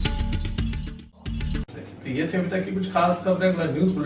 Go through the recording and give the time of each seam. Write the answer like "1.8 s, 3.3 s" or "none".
none